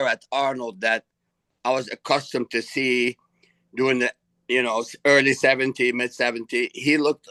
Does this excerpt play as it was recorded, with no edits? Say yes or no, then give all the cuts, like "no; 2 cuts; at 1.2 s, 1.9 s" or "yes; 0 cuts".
yes; 0 cuts